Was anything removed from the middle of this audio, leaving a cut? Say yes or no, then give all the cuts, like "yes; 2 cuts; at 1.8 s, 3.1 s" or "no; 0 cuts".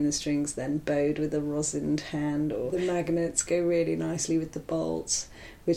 yes; 1 cut; at 2.7 s